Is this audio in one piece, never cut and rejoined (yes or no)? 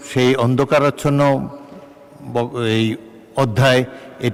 yes